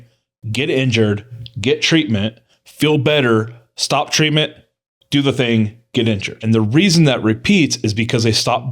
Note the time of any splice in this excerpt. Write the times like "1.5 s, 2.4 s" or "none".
6.3 s

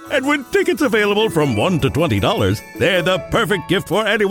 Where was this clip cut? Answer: none

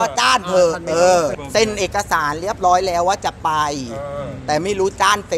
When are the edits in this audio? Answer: 1.4 s

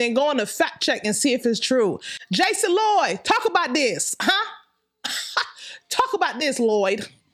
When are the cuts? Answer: 2.1 s

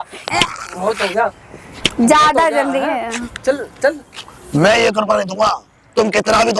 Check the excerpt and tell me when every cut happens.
none

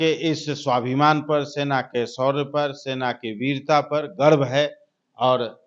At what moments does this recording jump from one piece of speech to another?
none

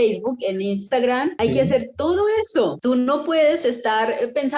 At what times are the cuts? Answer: 1.3 s, 2.8 s

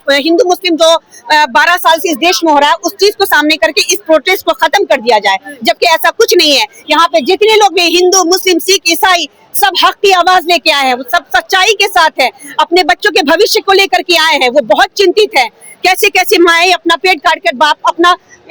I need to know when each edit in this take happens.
none

